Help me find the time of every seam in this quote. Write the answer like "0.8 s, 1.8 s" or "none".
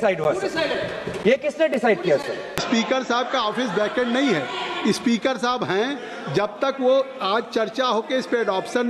2.6 s